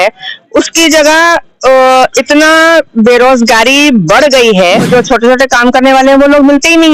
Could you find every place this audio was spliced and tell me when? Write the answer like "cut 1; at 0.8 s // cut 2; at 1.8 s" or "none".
cut 1; at 4.9 s